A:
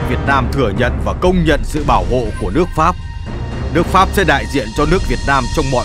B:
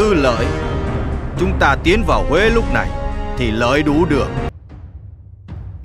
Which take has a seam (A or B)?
B